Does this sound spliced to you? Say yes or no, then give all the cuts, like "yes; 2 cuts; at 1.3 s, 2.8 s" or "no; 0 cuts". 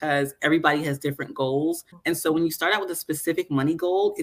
yes; 1 cut; at 1.9 s